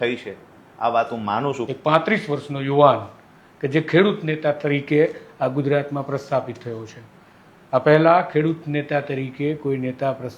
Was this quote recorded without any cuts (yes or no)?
no